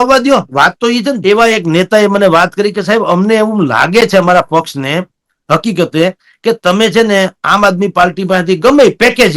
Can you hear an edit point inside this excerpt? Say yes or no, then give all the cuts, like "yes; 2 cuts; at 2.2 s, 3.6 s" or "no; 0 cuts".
yes; 1 cut; at 1.2 s